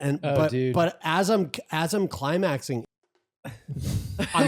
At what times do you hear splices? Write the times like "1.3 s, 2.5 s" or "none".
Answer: 2.8 s